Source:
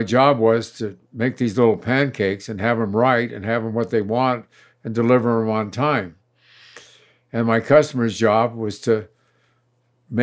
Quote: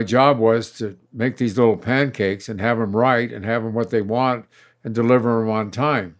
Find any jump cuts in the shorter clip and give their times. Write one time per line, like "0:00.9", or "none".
none